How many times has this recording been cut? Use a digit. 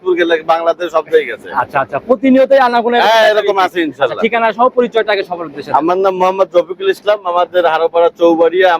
0